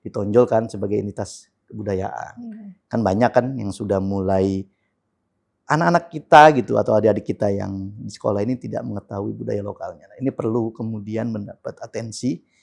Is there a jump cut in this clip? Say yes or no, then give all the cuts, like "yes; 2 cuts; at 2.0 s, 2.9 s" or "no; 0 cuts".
no; 0 cuts